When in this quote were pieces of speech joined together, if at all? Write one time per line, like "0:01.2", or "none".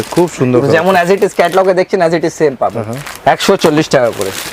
none